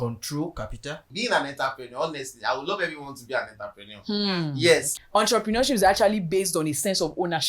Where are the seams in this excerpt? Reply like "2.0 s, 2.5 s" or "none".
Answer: 1.1 s, 4.9 s

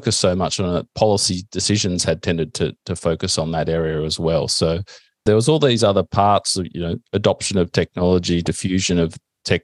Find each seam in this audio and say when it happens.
5.2 s

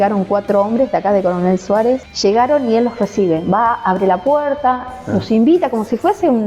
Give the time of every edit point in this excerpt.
2.1 s

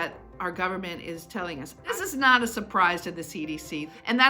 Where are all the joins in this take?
1.7 s

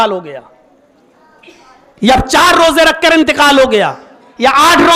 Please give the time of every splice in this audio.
none

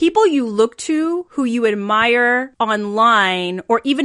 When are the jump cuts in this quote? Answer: 1.3 s, 2.5 s

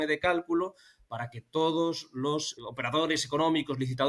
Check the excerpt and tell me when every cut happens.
2.5 s

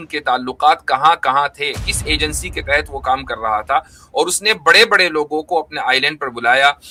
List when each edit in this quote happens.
none

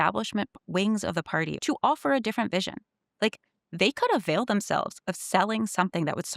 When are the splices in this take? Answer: 1.6 s

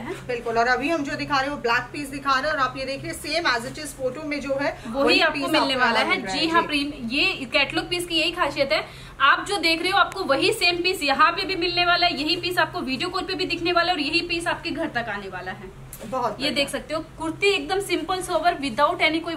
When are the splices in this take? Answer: none

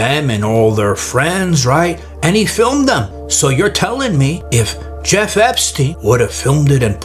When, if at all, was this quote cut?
3.2 s, 4.4 s, 5.9 s

